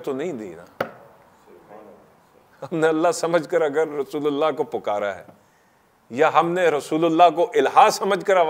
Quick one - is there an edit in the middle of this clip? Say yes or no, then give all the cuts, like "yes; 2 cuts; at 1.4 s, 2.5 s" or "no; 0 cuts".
no; 0 cuts